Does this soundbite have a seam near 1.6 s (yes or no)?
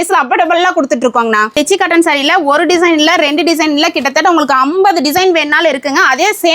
yes